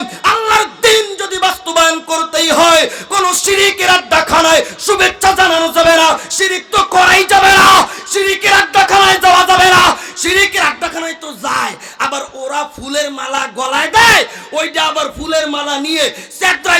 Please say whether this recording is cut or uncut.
uncut